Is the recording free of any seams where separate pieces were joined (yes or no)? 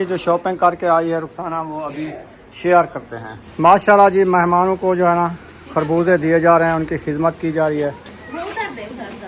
no